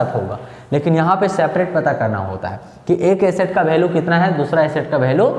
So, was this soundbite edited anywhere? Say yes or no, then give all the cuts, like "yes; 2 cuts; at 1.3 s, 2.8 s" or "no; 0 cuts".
no; 0 cuts